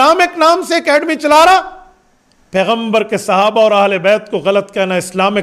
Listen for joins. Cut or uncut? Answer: uncut